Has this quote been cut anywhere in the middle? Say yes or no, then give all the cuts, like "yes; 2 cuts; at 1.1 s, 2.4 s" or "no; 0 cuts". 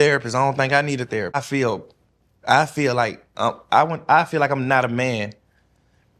yes; 1 cut; at 1.4 s